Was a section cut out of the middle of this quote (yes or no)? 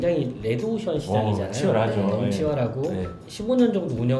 yes